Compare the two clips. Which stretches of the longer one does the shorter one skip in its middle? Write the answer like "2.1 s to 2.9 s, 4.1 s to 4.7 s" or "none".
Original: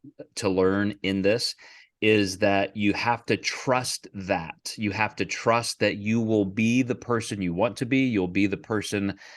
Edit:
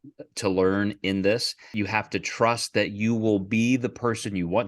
1.6 s to 4.6 s